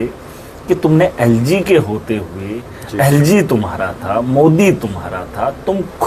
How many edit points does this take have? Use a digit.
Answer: 0